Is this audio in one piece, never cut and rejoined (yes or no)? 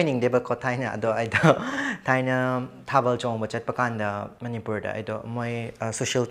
no